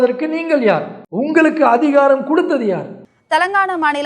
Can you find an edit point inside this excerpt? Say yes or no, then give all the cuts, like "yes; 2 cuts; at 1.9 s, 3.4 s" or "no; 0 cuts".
yes; 1 cut; at 2.9 s